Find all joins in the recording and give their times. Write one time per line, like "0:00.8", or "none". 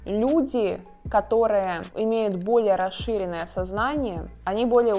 0:01.8